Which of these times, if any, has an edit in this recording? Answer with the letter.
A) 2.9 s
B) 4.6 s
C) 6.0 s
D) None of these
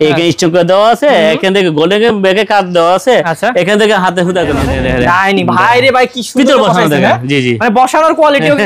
B